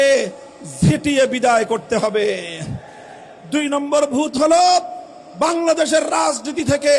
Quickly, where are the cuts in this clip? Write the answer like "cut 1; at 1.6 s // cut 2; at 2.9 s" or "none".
none